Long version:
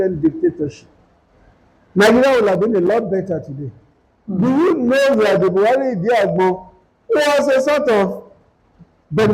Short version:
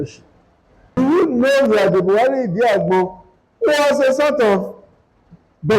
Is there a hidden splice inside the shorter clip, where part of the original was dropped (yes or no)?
yes